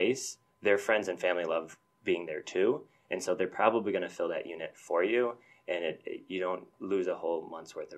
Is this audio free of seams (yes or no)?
no